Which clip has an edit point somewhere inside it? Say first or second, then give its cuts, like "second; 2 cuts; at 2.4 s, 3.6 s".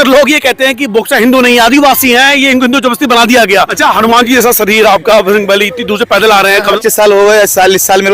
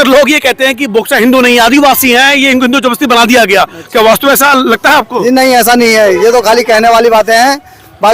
first; 2 cuts; at 3.7 s, 6.7 s